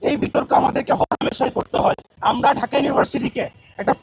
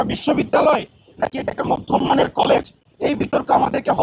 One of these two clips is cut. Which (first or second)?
first